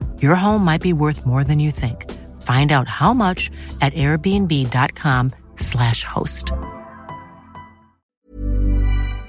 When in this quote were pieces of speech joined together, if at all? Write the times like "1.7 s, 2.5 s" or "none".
8.1 s